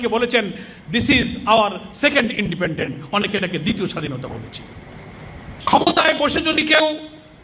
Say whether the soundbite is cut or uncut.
cut